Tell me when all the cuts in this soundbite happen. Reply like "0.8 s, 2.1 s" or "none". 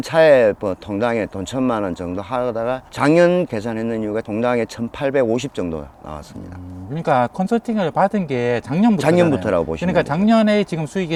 none